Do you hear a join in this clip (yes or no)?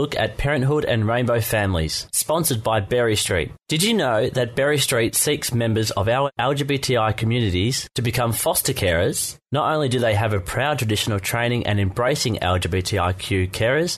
no